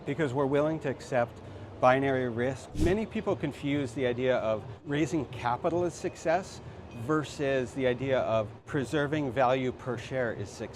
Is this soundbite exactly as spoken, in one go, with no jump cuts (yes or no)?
no